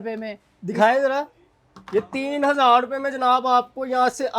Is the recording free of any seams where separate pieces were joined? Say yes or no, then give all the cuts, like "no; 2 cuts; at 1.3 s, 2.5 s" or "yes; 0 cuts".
yes; 0 cuts